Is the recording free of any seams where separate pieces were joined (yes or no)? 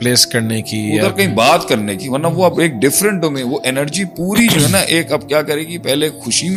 yes